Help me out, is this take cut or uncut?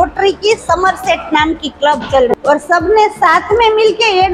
cut